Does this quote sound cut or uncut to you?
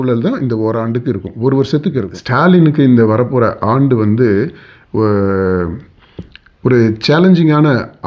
cut